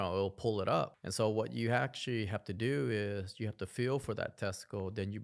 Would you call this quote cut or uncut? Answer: cut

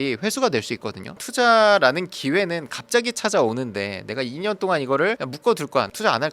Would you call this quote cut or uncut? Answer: cut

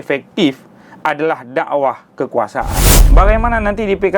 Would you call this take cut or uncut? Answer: cut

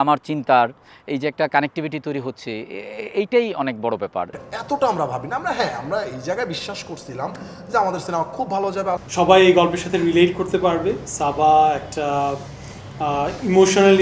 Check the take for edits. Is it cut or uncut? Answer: cut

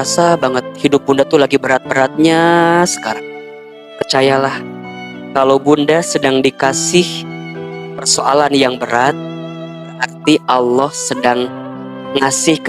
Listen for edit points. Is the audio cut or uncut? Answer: uncut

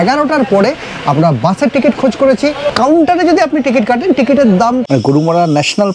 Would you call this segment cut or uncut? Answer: cut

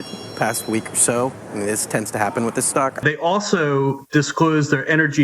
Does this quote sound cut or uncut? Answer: cut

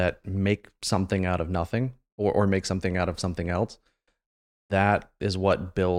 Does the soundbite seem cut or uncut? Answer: uncut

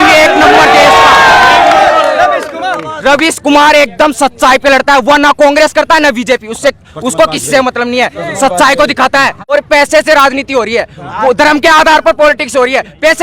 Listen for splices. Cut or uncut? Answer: cut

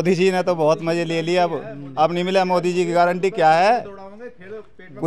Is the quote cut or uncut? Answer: uncut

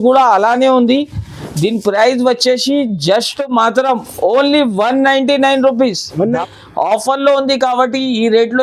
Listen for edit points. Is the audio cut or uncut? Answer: cut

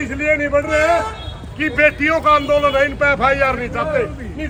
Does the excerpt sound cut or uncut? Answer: uncut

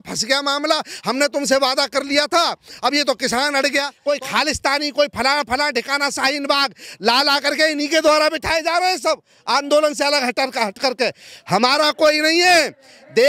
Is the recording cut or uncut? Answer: cut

